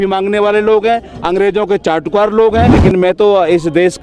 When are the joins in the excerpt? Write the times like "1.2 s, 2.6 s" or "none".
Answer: 2.7 s